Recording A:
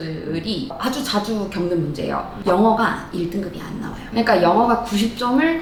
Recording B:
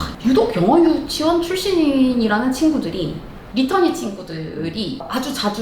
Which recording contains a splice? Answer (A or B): B